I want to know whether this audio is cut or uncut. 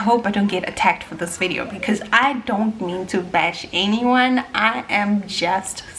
uncut